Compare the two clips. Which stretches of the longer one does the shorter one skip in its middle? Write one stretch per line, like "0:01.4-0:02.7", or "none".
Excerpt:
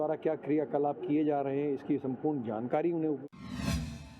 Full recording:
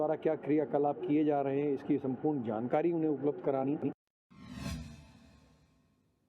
0:03.2-0:04.2